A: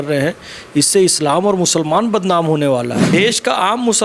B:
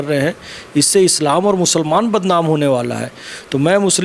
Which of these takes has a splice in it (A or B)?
A